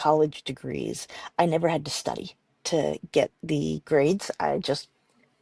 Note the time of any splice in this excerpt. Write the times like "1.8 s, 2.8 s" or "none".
none